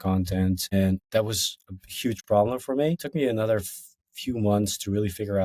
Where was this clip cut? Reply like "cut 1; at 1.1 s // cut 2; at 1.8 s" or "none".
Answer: cut 1; at 0.7 s // cut 2; at 3.0 s